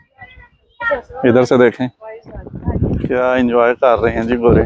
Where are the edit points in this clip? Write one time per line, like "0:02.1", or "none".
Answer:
0:02.8